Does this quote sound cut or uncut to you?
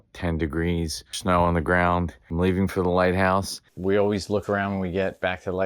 cut